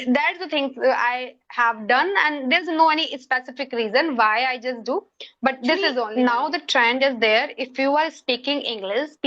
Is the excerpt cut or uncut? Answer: cut